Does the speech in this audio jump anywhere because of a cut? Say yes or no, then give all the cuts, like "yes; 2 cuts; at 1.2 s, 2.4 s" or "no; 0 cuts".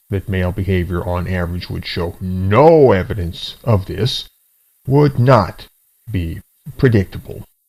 yes; 1 cut; at 3.9 s